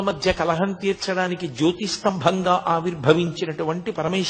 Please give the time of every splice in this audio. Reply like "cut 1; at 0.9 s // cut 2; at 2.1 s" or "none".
none